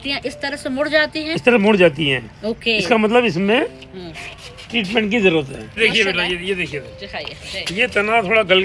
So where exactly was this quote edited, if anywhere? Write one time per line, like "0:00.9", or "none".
0:05.8